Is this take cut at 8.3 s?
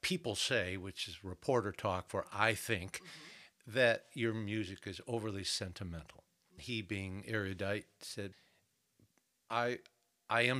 yes; 2 cuts; at 6.6 s, 8.3 s

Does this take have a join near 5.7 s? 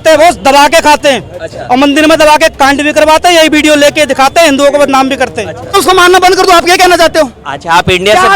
yes; 1 cut; at 5.7 s

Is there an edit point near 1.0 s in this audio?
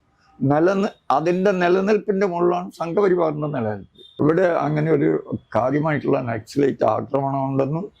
no; 1 cut; at 4.0 s

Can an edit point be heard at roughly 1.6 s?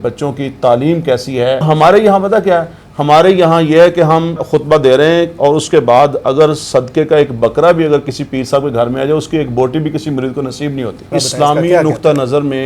yes; 3 cuts; at 1.6 s, 4.4 s, 11.1 s

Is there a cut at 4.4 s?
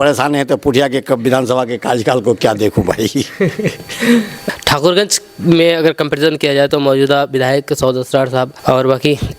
yes; 2 cuts; at 4.4 s, 8.5 s

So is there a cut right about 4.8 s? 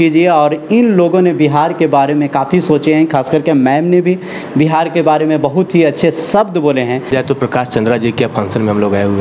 no; 1 cut; at 7.1 s

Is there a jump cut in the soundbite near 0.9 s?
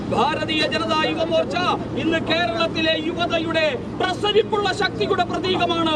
no; 0 cuts

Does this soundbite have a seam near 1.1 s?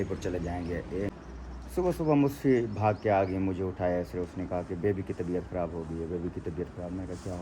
yes; 1 cut; at 1.1 s

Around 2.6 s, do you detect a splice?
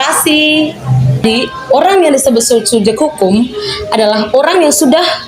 no; 1 cut; at 1.2 s

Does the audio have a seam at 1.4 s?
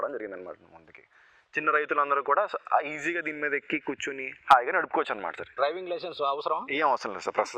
no; 1 cut; at 5.6 s

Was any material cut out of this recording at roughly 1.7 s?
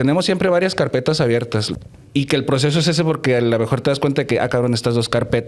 yes; 1 cut; at 1.7 s

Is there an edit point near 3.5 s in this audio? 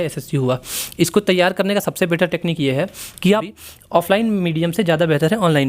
yes; 1 cut; at 3.5 s

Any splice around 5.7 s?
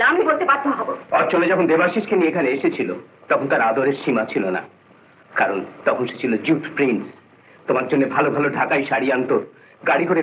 no; 1 cut; at 1.0 s

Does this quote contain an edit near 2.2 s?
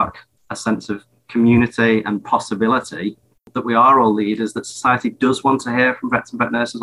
no; 1 cut; at 3.5 s

